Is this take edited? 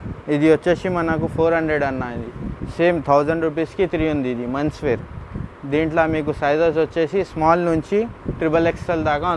no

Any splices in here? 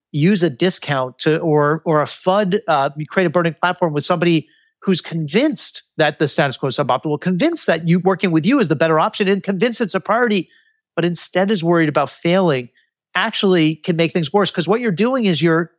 no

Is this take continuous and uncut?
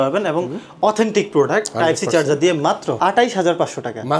no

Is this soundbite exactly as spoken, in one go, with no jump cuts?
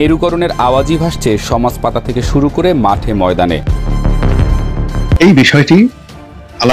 no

